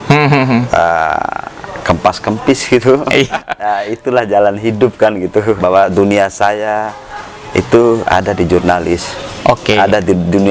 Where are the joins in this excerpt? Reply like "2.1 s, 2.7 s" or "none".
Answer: 3.3 s, 5.6 s